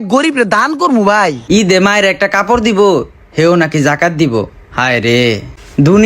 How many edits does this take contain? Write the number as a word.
one